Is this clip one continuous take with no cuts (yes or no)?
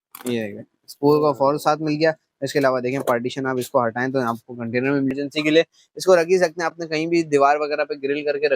no